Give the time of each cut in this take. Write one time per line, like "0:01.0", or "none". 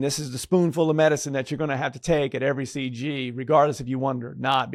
none